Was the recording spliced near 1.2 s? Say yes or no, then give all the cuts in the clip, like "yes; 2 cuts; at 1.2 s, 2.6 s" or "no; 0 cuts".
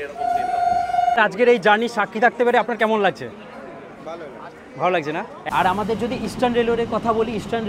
yes; 2 cuts; at 1.2 s, 5.4 s